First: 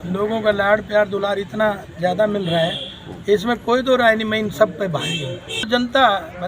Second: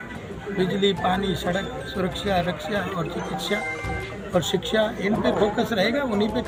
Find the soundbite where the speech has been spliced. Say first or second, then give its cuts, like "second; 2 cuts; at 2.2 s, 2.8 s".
first; 1 cut; at 5.6 s